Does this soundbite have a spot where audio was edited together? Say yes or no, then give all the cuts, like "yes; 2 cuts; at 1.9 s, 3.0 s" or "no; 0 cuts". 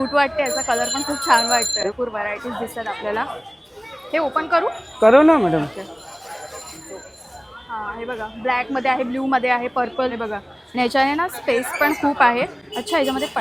no; 0 cuts